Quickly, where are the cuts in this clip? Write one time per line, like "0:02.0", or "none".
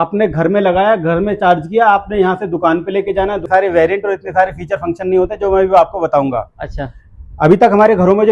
0:03.5